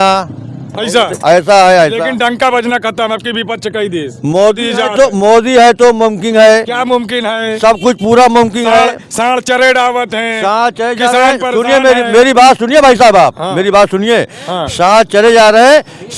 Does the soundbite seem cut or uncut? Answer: uncut